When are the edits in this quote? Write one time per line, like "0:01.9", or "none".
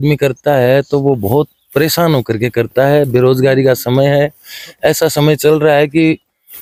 none